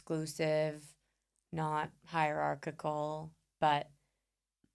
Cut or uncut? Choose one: uncut